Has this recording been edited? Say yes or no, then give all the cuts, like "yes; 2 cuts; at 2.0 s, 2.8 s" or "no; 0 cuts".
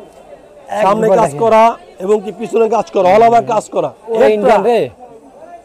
yes; 1 cut; at 4.0 s